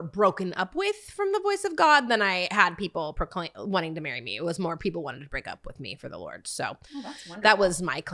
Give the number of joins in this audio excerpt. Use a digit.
0